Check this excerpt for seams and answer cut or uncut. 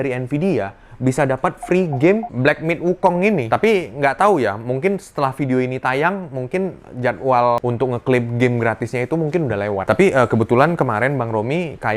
cut